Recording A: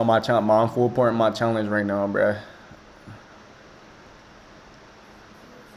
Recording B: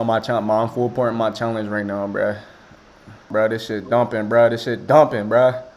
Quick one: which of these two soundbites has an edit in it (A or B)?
B